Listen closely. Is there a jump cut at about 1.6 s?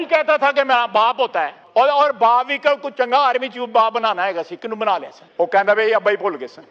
yes; 2 cuts; at 1.6 s, 5.2 s

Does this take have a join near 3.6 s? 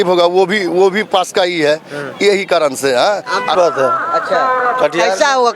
yes; 1 cut; at 3.6 s

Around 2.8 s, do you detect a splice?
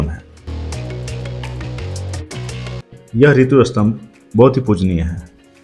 yes; 1 cut; at 2.8 s

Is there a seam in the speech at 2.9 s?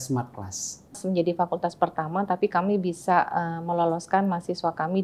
no; 1 cut; at 1.0 s

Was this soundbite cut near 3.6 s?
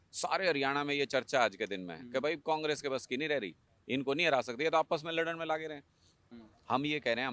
no; 1 cut; at 6.1 s

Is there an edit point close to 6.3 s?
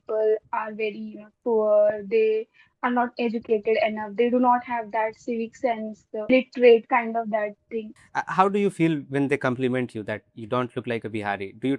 yes; 2 cuts; at 6.3 s, 8.0 s

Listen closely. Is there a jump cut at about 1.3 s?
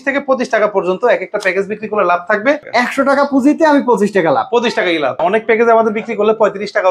no; 2 cuts; at 2.7 s, 5.2 s

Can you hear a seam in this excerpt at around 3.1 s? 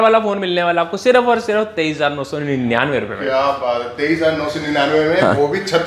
no; 0 cuts

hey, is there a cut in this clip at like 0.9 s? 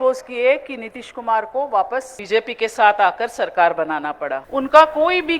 no; 2 cuts; at 2.2 s, 4.5 s

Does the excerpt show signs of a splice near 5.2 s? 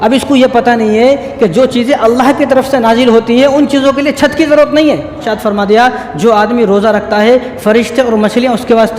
yes; 1 cut; at 5.2 s

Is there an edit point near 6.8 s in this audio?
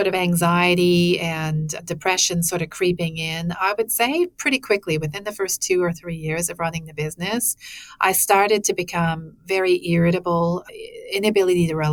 no; 0 cuts

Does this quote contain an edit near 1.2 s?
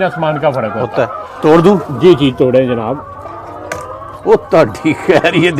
yes; 1 cut; at 1.2 s

